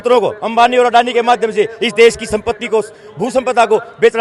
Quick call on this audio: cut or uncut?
uncut